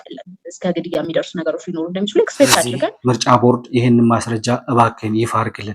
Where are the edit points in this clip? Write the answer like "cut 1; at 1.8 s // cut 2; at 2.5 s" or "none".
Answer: cut 1; at 2.8 s